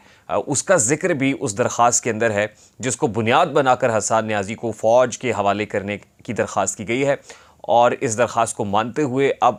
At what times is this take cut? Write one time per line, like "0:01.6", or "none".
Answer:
none